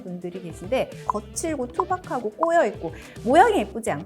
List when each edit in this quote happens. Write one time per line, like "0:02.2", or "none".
0:01.0